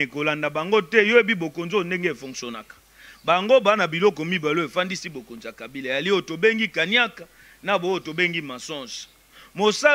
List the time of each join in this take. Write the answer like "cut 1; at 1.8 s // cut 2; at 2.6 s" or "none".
none